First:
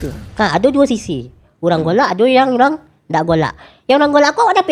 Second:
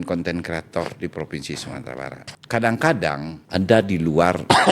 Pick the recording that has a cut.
second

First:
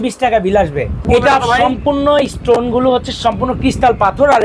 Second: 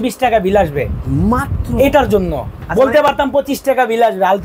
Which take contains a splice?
first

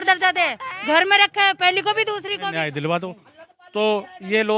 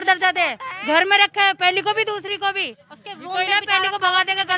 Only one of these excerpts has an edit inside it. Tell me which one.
first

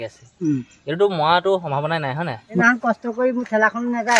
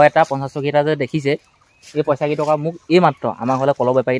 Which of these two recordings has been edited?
first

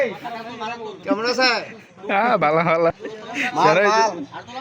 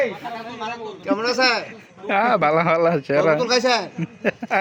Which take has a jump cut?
first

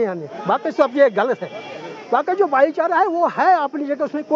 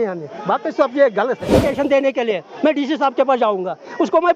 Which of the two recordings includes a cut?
second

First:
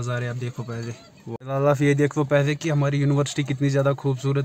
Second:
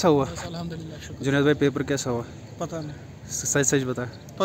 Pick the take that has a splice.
first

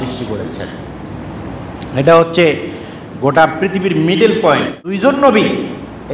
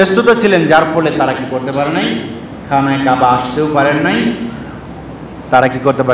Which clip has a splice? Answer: first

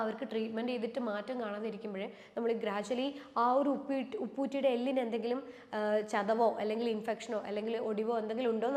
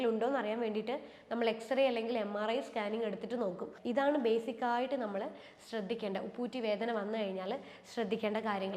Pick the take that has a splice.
second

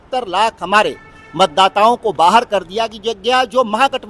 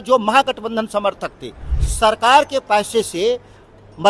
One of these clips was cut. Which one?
second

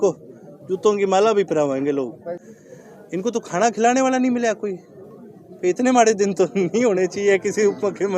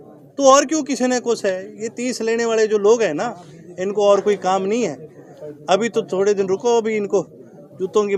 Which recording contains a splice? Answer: first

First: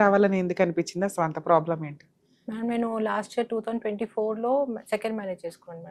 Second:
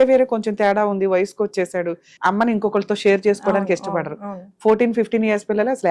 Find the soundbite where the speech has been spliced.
second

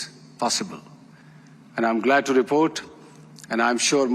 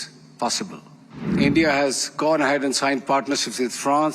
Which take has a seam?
second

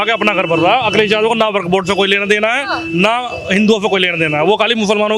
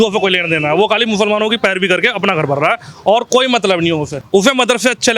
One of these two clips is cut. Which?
second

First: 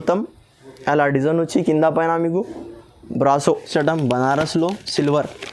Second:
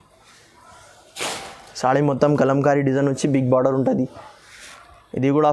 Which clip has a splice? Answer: first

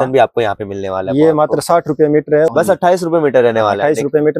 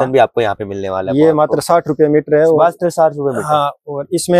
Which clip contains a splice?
first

